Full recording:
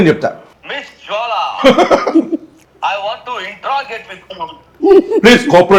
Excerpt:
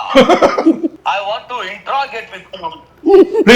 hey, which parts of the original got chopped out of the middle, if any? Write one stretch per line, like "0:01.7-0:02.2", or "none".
0:02.5-0:02.7